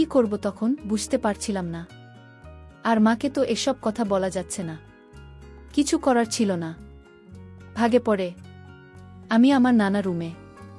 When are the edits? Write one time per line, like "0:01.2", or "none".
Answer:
0:04.3